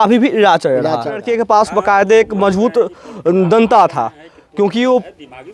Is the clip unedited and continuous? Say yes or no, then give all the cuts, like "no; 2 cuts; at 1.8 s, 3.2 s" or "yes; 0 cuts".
no; 1 cut; at 1.3 s